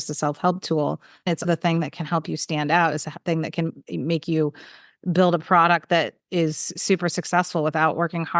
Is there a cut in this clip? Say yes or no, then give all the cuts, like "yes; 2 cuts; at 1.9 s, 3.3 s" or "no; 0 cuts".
yes; 1 cut; at 1.4 s